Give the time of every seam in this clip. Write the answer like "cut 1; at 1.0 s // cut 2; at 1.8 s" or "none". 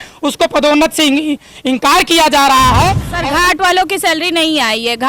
cut 1; at 3.1 s